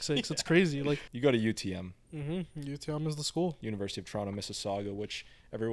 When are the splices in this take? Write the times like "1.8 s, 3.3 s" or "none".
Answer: 1.1 s, 3.6 s